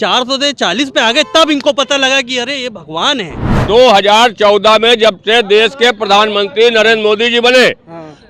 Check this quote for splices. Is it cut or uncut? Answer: cut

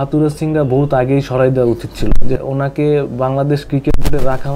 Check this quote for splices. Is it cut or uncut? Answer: cut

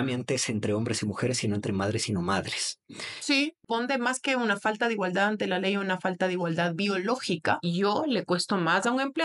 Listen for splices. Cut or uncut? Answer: cut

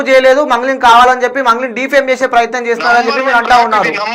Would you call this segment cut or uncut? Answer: uncut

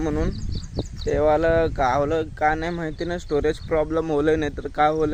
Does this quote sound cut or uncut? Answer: uncut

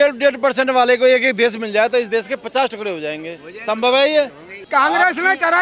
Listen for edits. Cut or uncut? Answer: cut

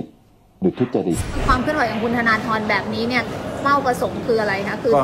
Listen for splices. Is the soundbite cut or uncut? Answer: cut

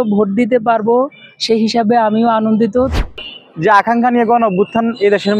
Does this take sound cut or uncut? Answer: cut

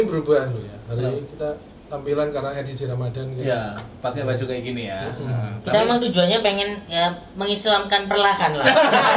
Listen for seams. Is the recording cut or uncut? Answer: uncut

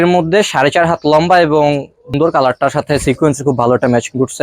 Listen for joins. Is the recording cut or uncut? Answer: cut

